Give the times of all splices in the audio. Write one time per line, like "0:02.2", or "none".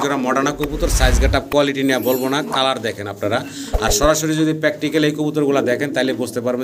none